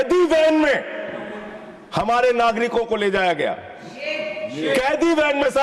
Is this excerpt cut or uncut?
uncut